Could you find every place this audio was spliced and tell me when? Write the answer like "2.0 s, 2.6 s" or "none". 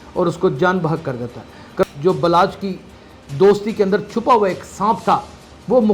1.8 s

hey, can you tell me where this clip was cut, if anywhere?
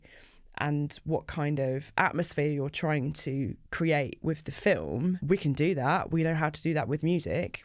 5.2 s

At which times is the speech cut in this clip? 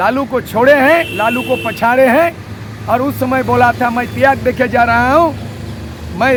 none

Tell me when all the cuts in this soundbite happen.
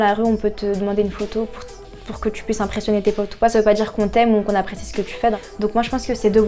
5.4 s

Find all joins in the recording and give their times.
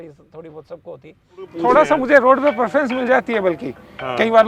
1.5 s

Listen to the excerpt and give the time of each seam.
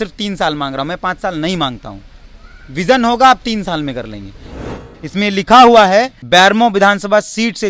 4.5 s, 6.2 s

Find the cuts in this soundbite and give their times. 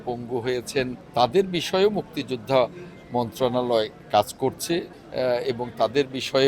1.0 s, 5.0 s

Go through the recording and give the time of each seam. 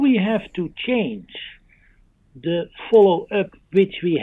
none

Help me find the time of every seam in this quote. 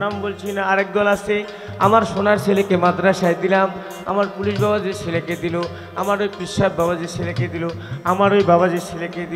none

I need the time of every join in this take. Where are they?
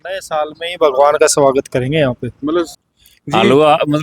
2.8 s

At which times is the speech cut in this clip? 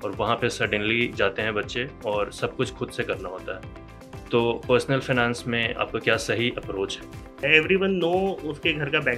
6.0 s, 7.4 s

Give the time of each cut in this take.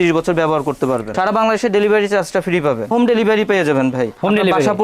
1.1 s, 2.9 s

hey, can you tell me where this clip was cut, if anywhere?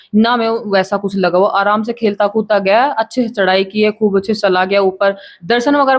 none

